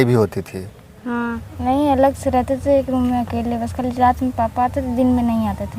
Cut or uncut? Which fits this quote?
cut